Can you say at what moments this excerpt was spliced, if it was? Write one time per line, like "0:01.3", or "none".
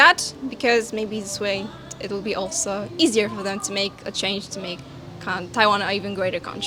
none